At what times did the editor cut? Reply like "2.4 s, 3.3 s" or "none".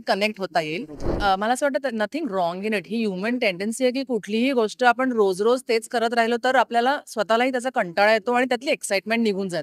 1.1 s